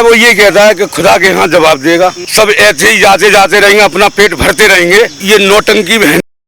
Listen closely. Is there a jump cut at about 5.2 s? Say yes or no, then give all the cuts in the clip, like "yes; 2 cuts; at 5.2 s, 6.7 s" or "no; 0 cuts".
yes; 2 cuts; at 2.2 s, 5.2 s